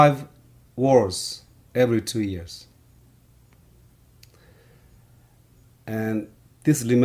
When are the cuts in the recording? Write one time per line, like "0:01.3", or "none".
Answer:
none